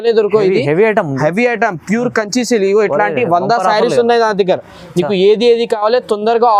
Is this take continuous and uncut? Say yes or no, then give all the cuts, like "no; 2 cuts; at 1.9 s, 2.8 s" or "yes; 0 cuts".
yes; 0 cuts